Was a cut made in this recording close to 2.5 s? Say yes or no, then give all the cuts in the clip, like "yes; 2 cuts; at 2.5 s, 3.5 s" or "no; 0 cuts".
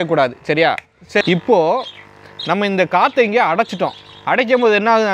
no; 1 cut; at 1.2 s